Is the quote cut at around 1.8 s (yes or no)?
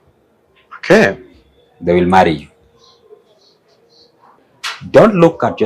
no